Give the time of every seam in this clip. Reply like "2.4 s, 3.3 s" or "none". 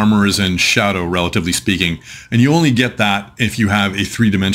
none